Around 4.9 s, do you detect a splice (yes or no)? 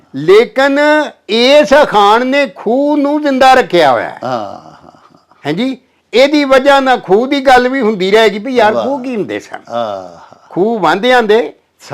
no